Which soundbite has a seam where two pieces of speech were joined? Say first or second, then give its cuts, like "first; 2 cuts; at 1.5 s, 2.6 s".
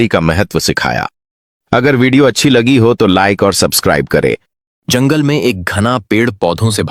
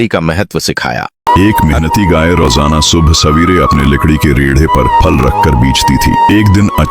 second; 1 cut; at 1.1 s